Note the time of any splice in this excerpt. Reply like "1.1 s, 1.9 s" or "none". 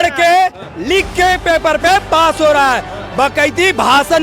none